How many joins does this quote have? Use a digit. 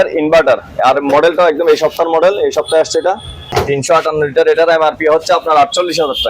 1